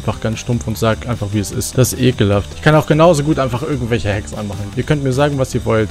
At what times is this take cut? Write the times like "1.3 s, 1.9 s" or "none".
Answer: 1.6 s, 4.5 s